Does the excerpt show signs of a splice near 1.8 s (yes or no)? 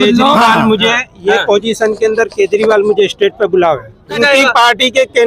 no